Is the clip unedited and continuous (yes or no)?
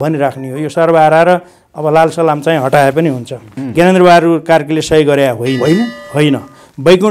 no